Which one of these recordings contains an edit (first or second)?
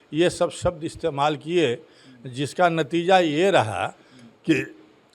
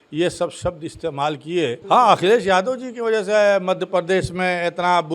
second